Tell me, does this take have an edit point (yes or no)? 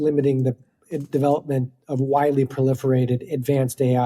no